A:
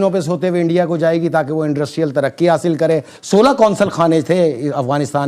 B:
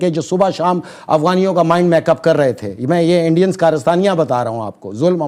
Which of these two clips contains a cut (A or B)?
A